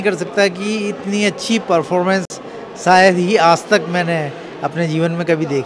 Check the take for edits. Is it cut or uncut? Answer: uncut